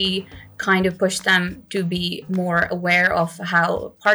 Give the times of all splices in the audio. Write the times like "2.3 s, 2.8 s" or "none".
none